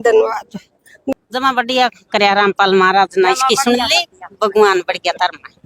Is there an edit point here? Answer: yes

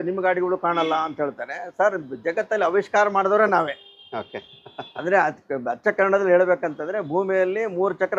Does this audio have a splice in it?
no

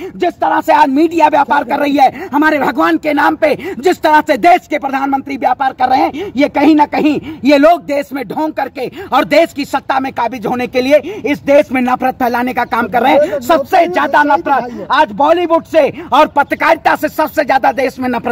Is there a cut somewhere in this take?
no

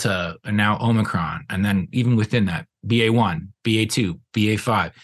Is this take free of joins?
yes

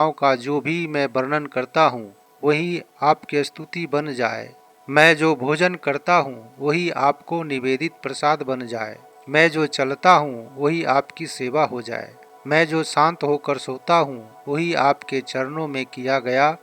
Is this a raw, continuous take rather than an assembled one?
yes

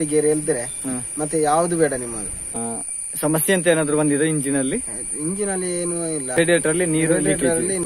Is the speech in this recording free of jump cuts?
yes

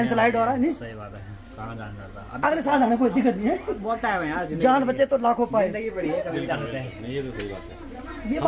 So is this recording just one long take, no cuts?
yes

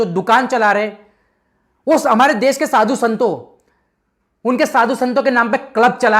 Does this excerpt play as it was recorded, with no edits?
yes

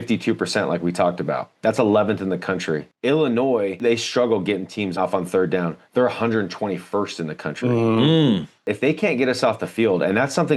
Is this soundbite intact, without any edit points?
no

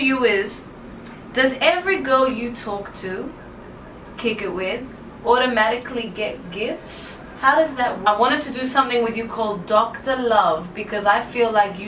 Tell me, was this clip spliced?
no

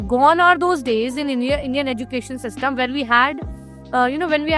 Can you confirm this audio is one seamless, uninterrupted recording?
yes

